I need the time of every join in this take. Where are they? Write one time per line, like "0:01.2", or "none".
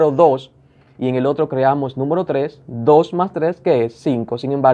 none